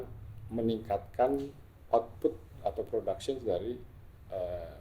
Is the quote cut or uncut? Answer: uncut